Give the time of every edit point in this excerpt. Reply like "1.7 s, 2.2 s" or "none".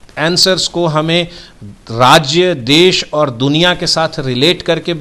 none